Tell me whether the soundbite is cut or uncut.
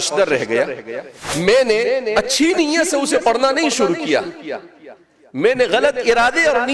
cut